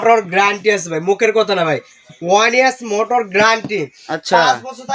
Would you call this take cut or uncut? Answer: uncut